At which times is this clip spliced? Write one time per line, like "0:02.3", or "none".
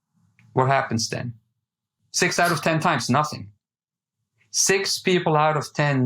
0:01.8